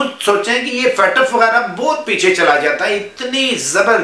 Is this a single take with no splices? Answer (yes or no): yes